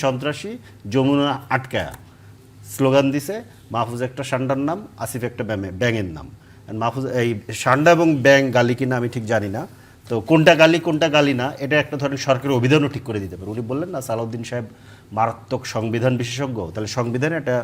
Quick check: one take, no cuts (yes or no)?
yes